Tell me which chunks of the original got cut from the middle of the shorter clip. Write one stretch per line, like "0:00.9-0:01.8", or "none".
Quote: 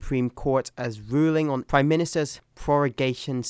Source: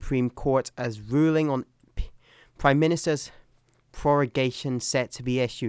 0:01.6-0:02.6
0:03.4-0:03.8